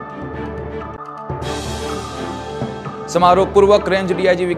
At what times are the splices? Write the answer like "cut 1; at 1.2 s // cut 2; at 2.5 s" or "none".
cut 1; at 0.9 s // cut 2; at 2.9 s